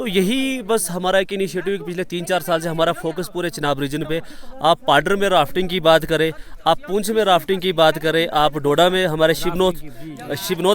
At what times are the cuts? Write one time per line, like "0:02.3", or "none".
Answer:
none